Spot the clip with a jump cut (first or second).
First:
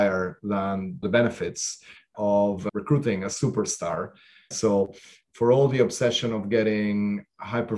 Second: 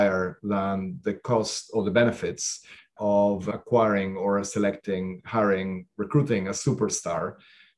first